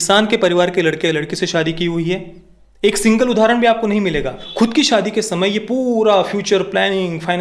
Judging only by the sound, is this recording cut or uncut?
cut